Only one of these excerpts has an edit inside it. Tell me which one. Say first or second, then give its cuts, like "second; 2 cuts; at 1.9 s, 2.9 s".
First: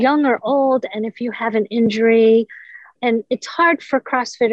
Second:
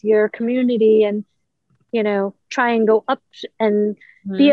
first; 1 cut; at 3.0 s